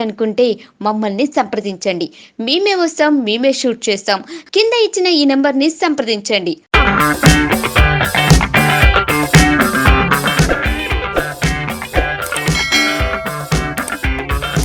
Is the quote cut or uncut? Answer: uncut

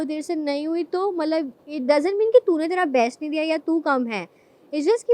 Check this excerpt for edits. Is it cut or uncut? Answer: uncut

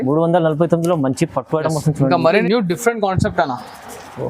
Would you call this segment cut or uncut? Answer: cut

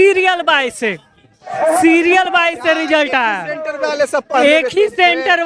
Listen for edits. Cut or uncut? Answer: uncut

